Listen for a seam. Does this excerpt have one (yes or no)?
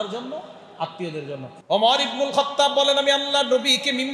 yes